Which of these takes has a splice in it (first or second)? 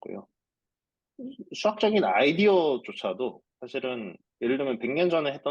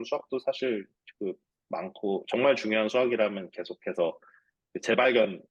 first